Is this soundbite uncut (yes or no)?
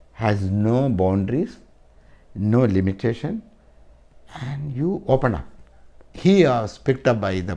no